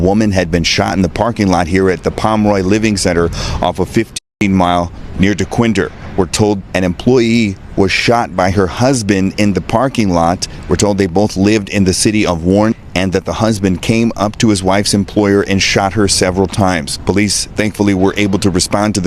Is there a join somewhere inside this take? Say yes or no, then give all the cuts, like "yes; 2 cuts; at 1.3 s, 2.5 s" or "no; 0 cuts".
yes; 1 cut; at 4.2 s